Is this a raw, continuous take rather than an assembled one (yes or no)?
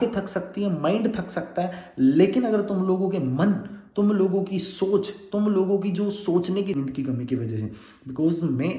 no